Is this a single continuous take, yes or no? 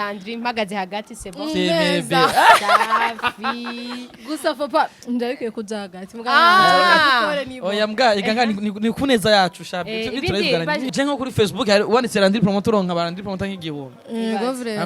no